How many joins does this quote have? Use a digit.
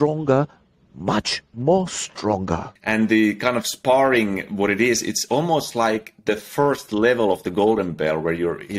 1